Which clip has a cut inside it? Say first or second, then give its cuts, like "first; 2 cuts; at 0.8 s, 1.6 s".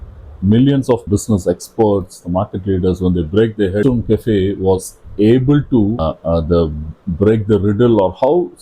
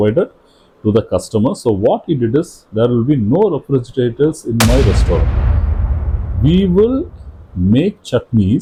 first; 3 cuts; at 1.0 s, 3.8 s, 6.0 s